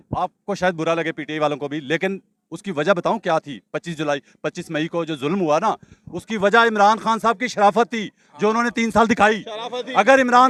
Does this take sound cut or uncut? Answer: uncut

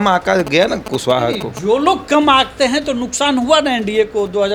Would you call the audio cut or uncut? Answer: uncut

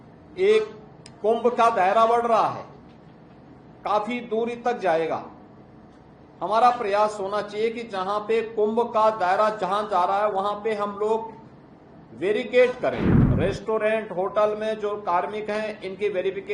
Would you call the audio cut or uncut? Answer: cut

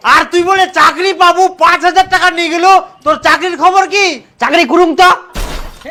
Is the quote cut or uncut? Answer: uncut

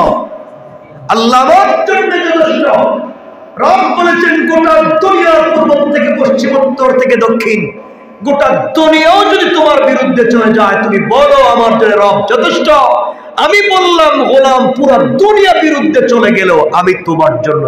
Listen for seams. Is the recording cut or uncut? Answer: uncut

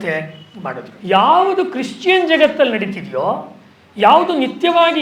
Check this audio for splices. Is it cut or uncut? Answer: cut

